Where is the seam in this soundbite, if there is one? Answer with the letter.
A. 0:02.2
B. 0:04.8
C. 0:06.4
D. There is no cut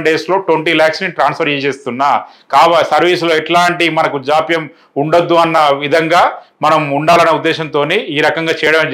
D